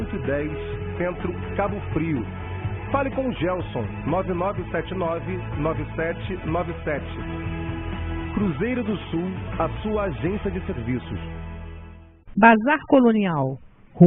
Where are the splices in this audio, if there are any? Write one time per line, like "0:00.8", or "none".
0:12.2